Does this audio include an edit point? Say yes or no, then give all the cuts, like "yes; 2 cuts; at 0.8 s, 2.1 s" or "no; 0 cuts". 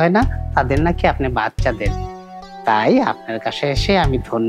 no; 0 cuts